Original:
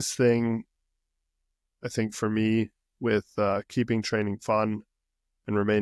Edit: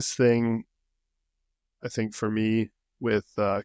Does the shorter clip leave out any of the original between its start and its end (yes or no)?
no